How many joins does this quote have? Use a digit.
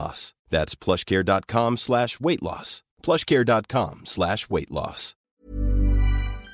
1